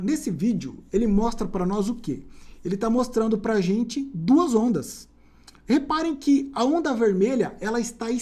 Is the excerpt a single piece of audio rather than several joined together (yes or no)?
yes